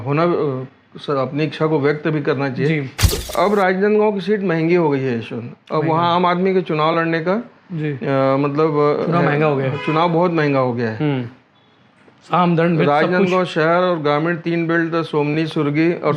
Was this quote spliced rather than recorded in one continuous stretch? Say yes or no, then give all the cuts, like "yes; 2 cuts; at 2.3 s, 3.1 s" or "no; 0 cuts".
yes; 1 cut; at 3.2 s